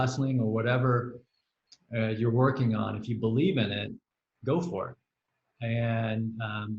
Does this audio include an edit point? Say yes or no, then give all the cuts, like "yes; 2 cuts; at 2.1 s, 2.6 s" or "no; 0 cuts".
no; 0 cuts